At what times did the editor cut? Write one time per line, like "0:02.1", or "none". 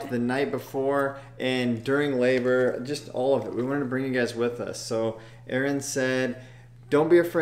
none